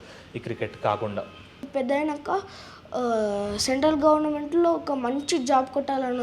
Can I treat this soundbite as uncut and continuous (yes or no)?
no